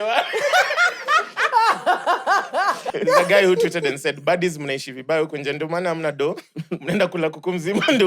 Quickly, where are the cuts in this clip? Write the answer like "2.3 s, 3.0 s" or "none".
2.9 s